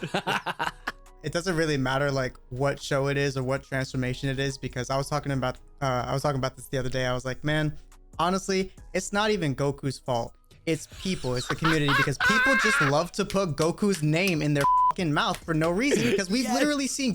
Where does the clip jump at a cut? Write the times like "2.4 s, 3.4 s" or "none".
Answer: 1.3 s